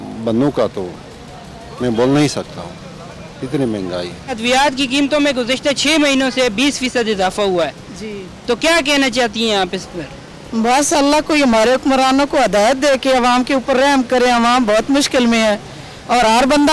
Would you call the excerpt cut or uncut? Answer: uncut